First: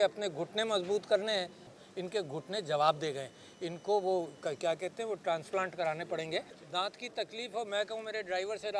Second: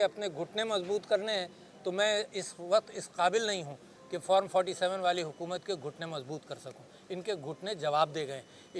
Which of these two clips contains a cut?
first; 2 cuts; at 1.6 s, 6.6 s

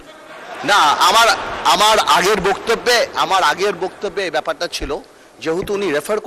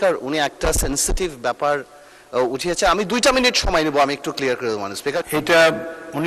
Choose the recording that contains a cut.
second; 1 cut; at 5.2 s

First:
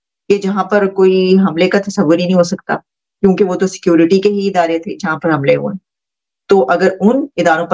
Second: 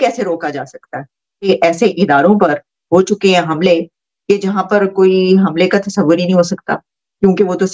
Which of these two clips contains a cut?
second; 1 cut; at 1.5 s

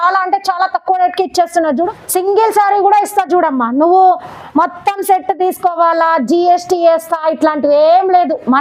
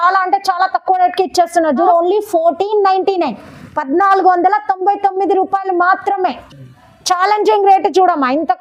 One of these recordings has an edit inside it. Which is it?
first; 1 cut; at 1.8 s

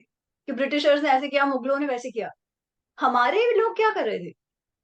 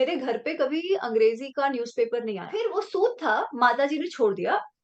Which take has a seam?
second; 1 cut; at 2.5 s

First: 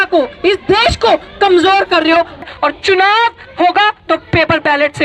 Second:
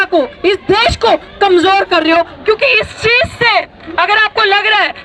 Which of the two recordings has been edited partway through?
first; 1 cut; at 2.5 s

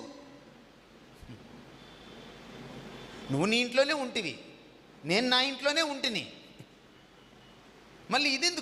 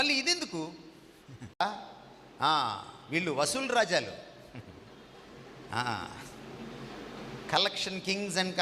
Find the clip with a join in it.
second; 1 cut; at 1.6 s

